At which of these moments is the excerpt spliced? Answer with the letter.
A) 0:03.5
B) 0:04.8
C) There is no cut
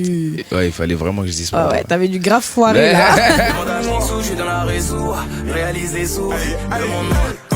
A